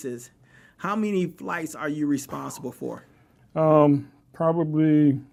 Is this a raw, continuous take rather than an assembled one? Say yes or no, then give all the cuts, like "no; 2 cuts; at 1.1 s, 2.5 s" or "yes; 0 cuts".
yes; 0 cuts